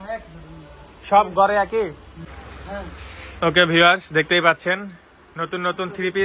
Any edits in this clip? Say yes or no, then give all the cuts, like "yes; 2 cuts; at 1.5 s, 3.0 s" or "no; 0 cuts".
yes; 1 cut; at 2.4 s